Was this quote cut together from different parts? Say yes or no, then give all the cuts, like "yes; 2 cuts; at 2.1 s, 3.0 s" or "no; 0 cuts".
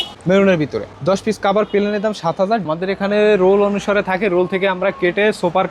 yes; 1 cut; at 2.7 s